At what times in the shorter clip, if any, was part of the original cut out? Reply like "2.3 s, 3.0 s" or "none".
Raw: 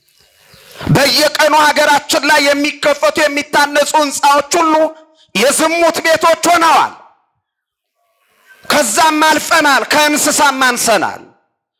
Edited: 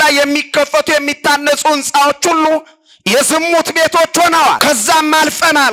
4.6 s